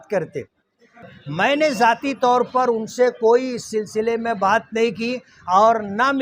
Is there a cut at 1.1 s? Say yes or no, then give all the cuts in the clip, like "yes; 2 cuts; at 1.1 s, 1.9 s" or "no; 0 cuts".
yes; 1 cut; at 1.1 s